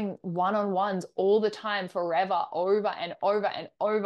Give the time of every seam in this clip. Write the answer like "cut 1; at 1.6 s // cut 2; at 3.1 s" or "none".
none